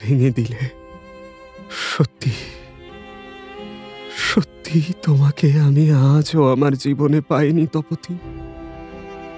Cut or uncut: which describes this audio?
cut